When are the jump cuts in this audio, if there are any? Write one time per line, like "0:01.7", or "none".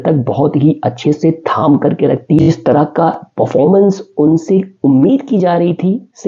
0:02.4